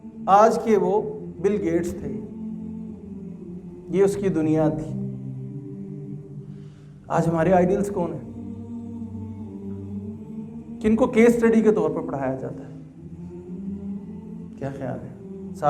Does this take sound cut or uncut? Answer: cut